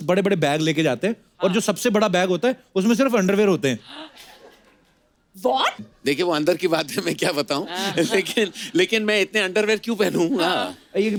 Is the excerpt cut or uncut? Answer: uncut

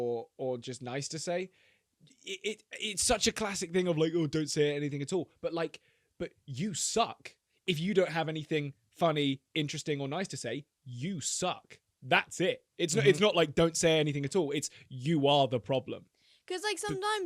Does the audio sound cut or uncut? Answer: uncut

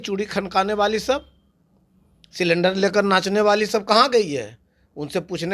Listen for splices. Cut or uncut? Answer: uncut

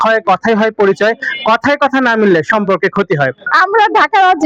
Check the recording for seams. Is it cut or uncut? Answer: cut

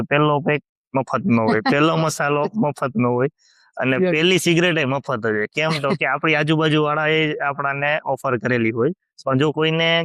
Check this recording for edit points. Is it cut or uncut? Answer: uncut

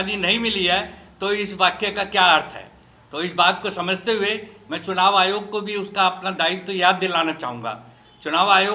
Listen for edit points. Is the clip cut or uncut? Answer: uncut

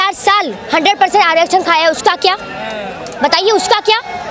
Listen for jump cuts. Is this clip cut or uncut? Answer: uncut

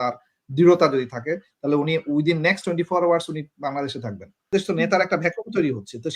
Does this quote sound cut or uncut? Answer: cut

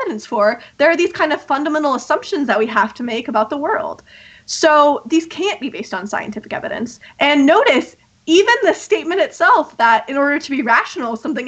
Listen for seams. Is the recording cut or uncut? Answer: uncut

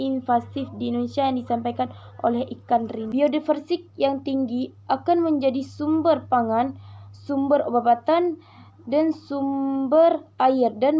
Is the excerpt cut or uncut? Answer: cut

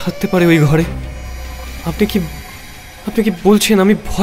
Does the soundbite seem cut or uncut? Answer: cut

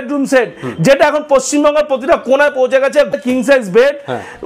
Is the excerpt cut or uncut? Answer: cut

